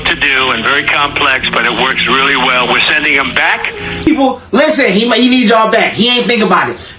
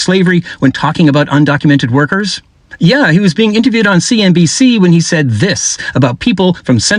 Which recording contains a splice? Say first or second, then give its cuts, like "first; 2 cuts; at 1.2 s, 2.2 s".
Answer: first; 1 cut; at 4.1 s